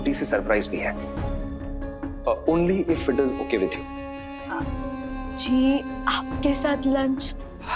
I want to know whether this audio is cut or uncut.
uncut